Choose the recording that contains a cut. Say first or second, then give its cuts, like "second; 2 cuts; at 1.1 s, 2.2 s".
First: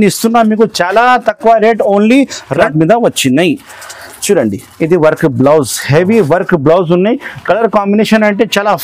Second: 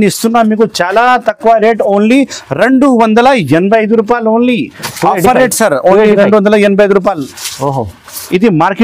first; 1 cut; at 2.6 s